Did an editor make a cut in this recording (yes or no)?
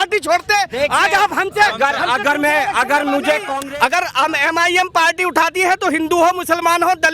yes